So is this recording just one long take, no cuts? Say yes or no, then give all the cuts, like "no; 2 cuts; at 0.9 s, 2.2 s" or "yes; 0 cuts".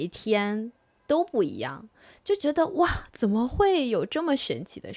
yes; 0 cuts